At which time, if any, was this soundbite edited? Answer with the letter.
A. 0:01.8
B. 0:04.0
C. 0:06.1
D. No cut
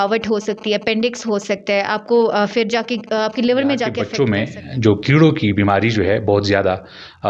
B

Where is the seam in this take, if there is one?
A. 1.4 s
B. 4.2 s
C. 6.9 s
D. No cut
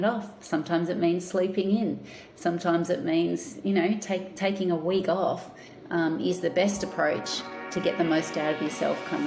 D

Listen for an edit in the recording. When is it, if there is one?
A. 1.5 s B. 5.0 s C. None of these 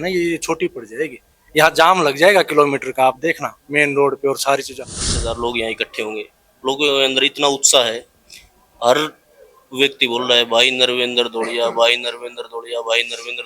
B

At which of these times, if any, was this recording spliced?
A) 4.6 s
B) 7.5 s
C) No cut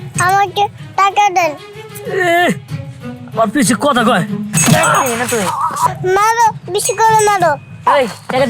A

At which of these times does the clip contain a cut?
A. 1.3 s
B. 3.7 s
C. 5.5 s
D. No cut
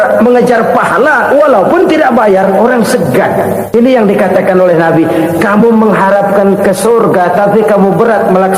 B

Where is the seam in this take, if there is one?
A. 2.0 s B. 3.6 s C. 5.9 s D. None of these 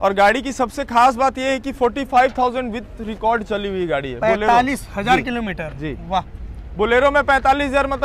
D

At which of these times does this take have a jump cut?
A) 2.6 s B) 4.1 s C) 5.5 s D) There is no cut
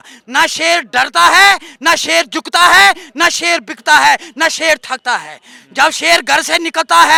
D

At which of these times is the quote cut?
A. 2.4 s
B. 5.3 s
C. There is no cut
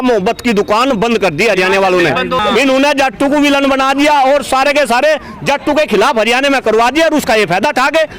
A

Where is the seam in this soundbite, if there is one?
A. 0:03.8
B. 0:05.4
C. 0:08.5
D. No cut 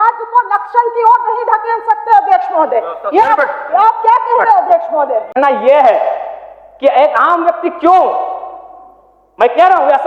B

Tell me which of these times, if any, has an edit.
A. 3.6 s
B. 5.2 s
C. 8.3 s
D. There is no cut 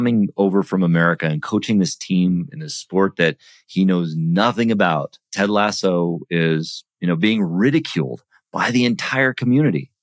B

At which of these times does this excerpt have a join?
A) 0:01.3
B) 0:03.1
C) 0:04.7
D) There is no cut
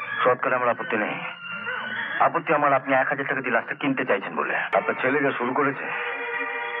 C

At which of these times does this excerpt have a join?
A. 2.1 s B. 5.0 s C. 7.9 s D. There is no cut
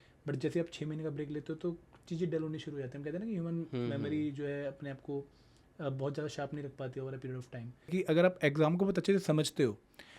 C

